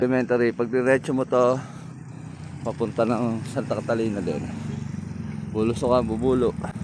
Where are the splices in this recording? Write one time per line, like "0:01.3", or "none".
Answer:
none